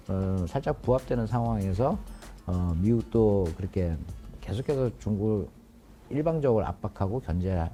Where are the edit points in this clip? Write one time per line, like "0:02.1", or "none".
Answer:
none